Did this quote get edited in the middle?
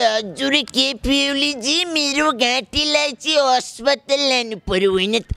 no; 0 cuts

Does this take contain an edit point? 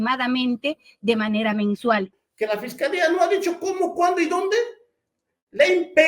yes; 1 cut; at 2.1 s

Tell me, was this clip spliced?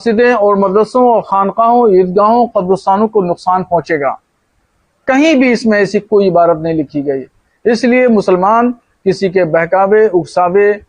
no; 0 cuts

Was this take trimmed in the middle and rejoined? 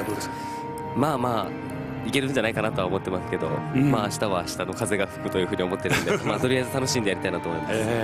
yes; 1 cut; at 5.0 s

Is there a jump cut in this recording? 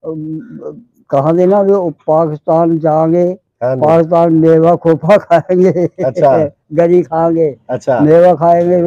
no; 0 cuts

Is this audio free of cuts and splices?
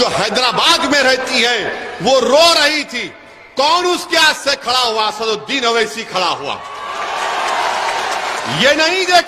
yes; 0 cuts

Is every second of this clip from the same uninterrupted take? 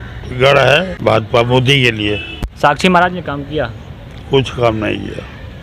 no; 2 cuts; at 0.9 s, 2.5 s

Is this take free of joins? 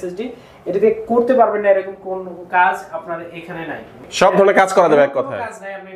no; 1 cut; at 4.0 s

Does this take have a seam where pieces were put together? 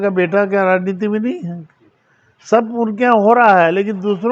no; 0 cuts

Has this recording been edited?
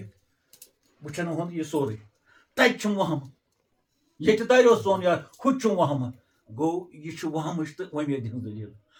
no; 0 cuts

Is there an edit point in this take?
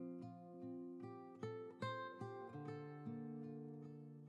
no; 0 cuts

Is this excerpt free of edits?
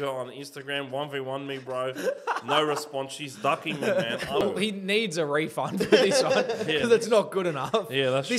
no; 1 cut; at 4.4 s

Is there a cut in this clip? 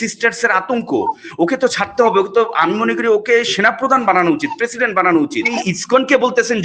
yes; 1 cut; at 5.6 s

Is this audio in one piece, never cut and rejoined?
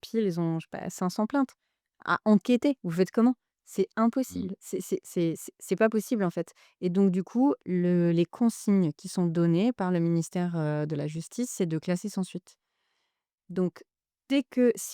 yes; 0 cuts

